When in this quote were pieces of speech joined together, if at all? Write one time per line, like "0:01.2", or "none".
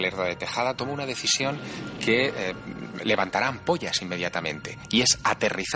none